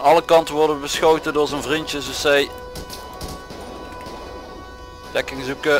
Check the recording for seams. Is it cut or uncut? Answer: uncut